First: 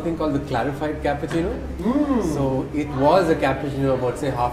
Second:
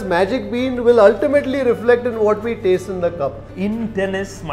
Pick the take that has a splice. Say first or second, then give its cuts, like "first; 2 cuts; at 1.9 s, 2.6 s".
second; 1 cut; at 3.5 s